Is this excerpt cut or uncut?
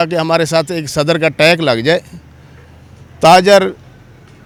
uncut